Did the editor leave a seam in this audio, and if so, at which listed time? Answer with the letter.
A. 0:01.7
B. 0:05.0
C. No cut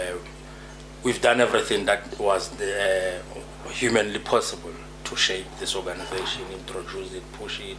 C